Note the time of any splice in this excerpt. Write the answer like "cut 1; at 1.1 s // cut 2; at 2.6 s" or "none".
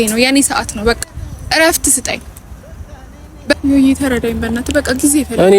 cut 1; at 3.6 s